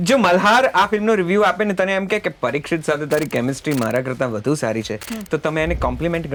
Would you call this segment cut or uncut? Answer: uncut